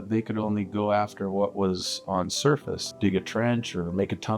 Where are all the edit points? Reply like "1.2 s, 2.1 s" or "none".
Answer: 2.9 s